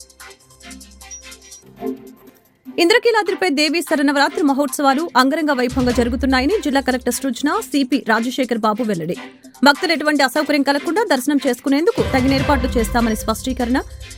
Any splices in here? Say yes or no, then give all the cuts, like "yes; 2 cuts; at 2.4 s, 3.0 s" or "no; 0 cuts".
no; 0 cuts